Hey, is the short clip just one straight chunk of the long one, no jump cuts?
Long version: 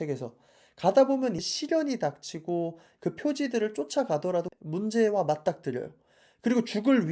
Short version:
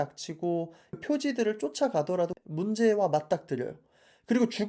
no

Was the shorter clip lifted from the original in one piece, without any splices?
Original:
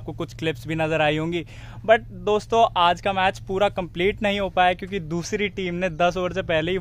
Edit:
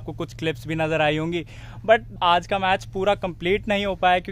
no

